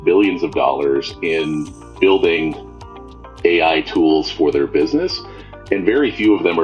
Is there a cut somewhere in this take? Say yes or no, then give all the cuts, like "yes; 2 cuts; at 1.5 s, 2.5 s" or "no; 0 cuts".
no; 0 cuts